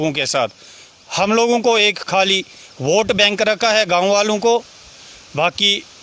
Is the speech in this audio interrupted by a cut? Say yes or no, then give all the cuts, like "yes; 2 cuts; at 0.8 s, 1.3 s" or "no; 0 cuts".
no; 0 cuts